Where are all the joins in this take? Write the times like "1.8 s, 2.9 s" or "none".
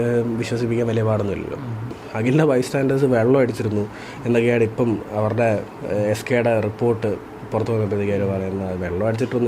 2.0 s